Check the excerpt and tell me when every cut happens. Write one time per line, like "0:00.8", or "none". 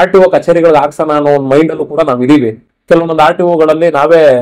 0:02.7